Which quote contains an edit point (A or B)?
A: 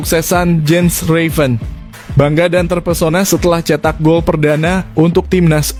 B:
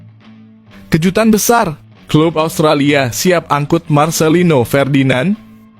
B